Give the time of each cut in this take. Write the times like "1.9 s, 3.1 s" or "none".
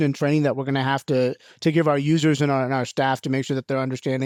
none

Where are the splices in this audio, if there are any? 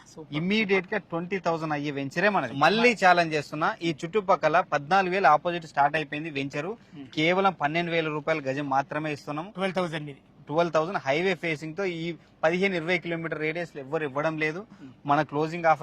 2.3 s

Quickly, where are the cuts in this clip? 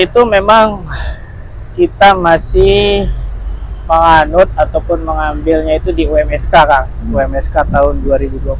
none

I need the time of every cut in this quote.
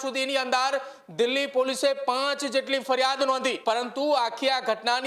3.6 s

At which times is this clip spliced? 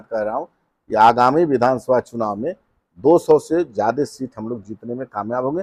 none

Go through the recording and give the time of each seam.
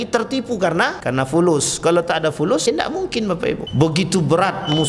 1.0 s, 2.7 s, 3.7 s

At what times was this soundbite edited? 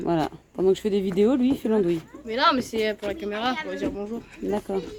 none

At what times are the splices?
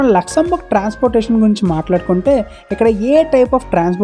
none

